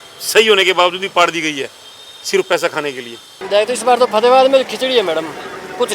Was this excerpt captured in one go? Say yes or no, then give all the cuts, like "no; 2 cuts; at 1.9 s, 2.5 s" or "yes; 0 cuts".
no; 1 cut; at 3.4 s